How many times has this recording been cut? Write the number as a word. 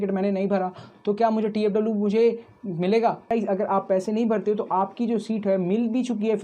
one